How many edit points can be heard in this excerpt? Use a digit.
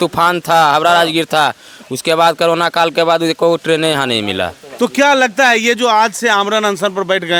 0